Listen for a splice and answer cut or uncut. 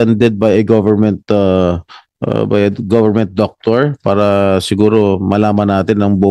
uncut